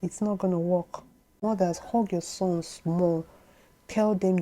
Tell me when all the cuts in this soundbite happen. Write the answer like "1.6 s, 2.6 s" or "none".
1.4 s